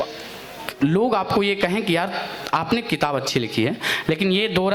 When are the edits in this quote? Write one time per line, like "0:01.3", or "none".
none